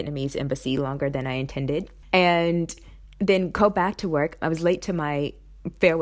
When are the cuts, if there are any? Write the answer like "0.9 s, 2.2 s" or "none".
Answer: 1.9 s, 4.3 s